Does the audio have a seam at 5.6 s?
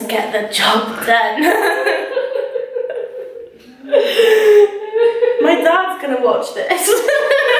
no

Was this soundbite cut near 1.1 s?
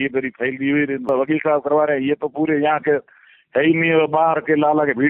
yes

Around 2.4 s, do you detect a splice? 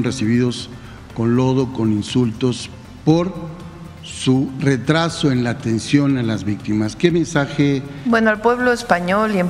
no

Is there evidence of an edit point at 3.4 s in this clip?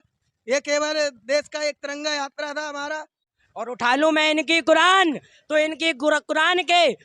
yes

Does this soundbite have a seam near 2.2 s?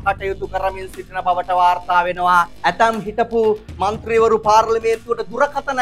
no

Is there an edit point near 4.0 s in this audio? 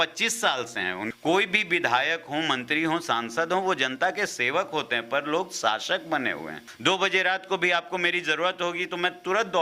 no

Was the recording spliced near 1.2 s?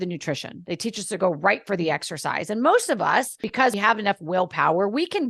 no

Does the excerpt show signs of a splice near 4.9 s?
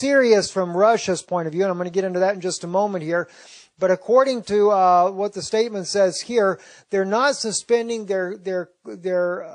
yes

